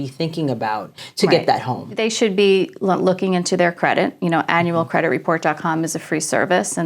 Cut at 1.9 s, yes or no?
yes